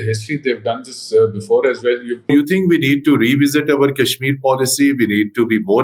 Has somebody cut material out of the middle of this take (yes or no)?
yes